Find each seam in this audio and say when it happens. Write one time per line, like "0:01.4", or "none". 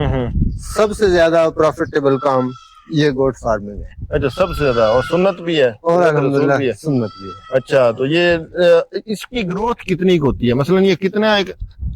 none